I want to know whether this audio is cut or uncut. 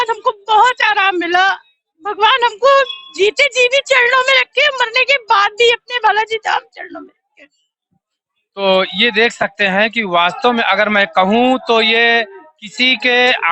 uncut